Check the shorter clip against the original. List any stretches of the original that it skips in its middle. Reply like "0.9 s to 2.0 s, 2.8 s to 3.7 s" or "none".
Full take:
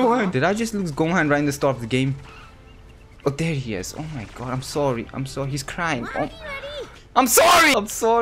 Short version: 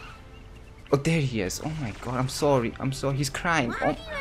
none